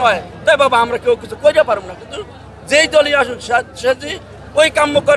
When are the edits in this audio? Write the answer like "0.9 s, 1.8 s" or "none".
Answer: none